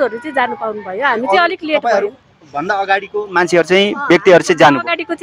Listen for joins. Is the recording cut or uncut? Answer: uncut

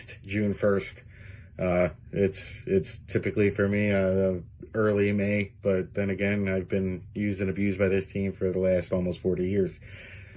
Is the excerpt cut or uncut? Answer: uncut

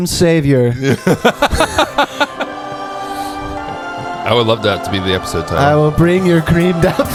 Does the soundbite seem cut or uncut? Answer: uncut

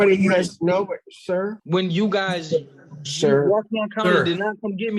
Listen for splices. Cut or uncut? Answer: cut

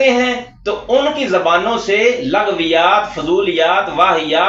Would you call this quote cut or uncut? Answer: uncut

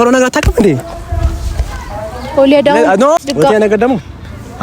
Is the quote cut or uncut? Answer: cut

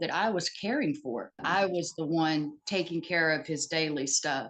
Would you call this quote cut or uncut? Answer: cut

